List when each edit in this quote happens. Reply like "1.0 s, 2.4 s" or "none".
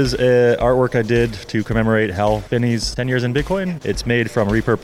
2.6 s, 3.8 s